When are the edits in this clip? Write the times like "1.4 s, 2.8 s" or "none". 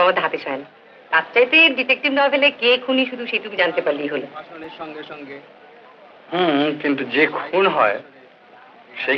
none